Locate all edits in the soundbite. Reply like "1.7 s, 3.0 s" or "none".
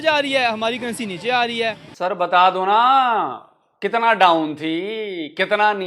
1.9 s